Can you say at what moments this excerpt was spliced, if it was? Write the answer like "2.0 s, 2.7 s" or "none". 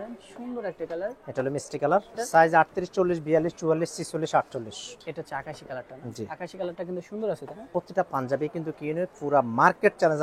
2.2 s, 4.9 s, 7.5 s